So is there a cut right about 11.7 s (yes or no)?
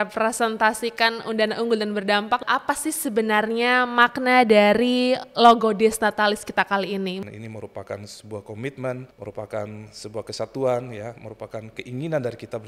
no